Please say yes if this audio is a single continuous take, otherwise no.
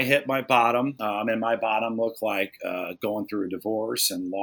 no